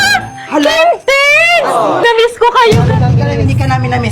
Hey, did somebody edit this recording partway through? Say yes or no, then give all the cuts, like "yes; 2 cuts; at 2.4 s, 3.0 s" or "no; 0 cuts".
yes; 1 cut; at 2.0 s